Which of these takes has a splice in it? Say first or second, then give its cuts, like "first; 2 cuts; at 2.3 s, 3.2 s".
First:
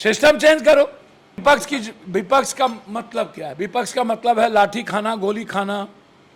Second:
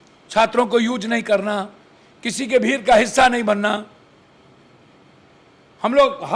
first; 1 cut; at 1.4 s